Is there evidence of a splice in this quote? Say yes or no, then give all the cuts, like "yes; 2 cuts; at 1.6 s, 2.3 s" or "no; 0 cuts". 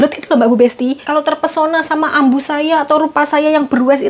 yes; 1 cut; at 1.0 s